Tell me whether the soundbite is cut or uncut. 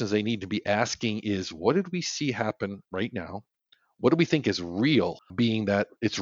cut